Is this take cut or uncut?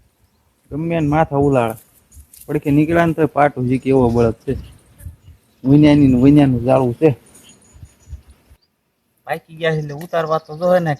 cut